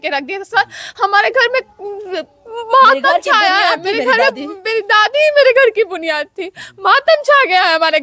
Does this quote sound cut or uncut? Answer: uncut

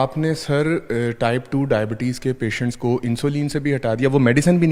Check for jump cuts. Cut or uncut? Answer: uncut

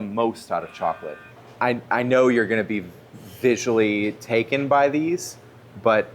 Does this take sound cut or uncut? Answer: cut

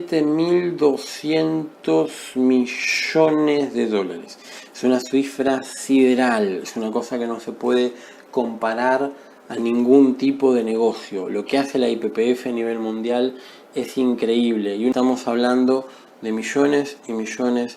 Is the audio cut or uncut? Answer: cut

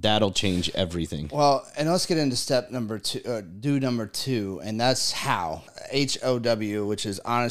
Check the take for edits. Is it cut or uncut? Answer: cut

